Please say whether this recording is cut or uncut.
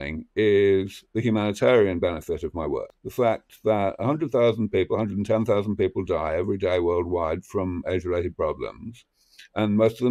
cut